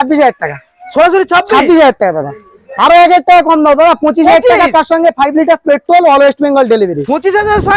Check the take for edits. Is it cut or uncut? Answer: uncut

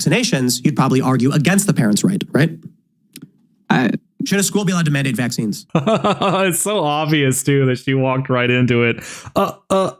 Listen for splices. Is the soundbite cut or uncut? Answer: uncut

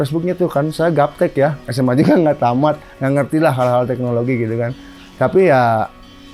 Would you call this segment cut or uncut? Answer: uncut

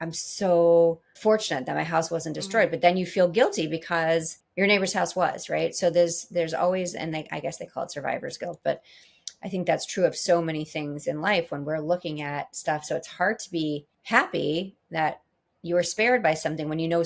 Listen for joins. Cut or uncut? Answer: cut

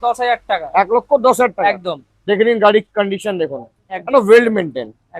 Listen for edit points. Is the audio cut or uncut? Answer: uncut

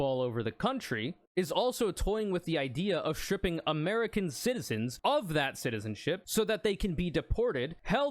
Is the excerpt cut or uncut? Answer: cut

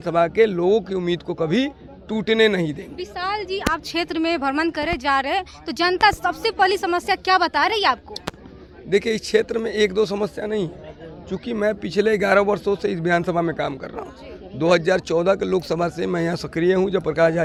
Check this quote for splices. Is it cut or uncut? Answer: uncut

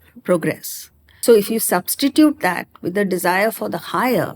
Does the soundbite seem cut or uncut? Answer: cut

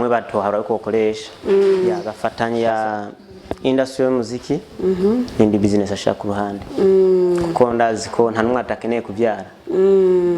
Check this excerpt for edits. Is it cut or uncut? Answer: cut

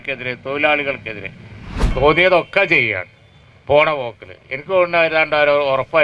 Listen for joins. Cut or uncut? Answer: cut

